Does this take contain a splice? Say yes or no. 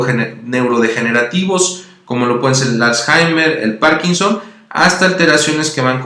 yes